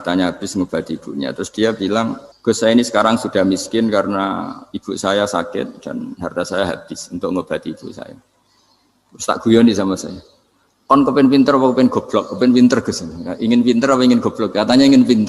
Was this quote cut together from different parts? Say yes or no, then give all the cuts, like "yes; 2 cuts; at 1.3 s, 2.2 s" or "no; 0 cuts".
yes; 1 cut; at 2.3 s